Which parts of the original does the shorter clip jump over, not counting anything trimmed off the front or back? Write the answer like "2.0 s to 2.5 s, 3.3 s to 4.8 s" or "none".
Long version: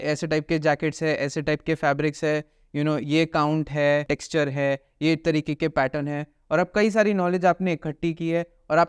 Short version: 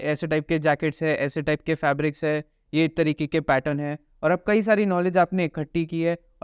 2.6 s to 4.9 s

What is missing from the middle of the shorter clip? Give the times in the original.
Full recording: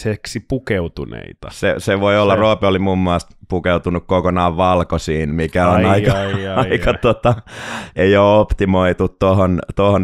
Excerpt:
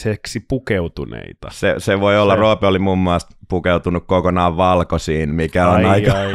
none

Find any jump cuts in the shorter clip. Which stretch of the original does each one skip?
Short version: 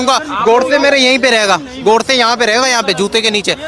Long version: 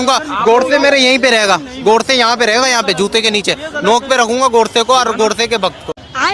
none

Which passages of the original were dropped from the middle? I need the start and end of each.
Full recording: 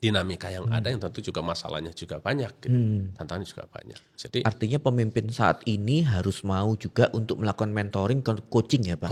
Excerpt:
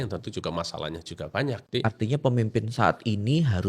2.5 s to 4.2 s

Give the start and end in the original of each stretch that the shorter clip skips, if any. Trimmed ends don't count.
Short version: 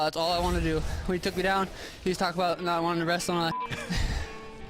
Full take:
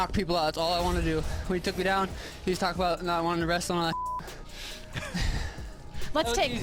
4.1 s to 4.9 s

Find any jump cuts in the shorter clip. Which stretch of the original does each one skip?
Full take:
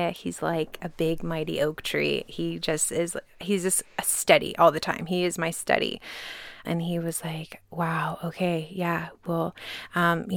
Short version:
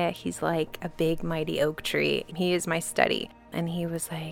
2.3 s to 5.0 s, 6.1 s to 6.5 s

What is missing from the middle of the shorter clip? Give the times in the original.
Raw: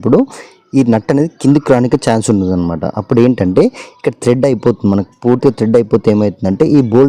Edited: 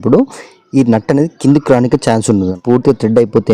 2.5 s to 5.1 s

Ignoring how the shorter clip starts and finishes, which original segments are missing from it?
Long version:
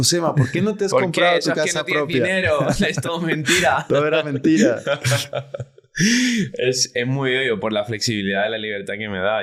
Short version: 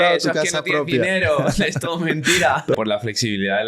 4.0 s to 7.6 s

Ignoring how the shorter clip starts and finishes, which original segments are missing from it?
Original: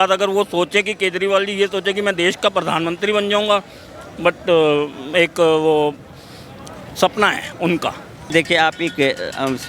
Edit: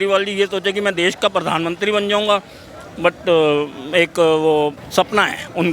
6.0 s to 6.9 s

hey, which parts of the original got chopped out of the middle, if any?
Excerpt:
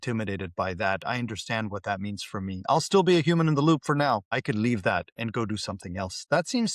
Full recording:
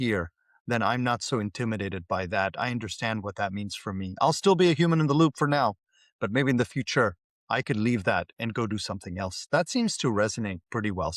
5.8 s to 7.5 s

